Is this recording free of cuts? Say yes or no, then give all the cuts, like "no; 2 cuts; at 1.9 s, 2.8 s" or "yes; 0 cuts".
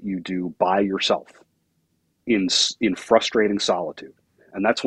yes; 0 cuts